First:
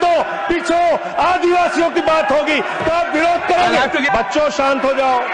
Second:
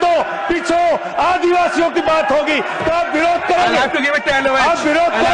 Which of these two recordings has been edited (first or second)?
first